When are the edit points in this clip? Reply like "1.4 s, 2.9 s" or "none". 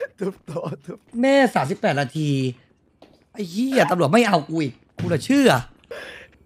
1.1 s